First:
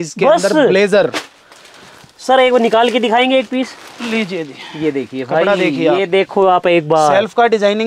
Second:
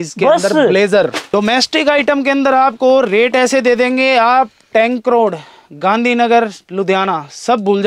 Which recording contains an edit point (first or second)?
second